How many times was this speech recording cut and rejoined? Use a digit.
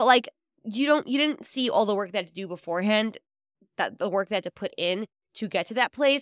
0